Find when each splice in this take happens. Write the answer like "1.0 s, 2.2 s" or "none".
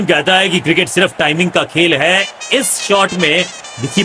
none